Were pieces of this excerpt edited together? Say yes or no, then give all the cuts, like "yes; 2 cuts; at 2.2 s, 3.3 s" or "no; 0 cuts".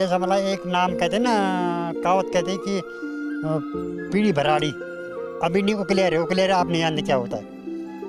no; 0 cuts